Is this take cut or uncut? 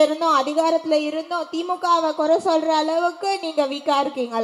uncut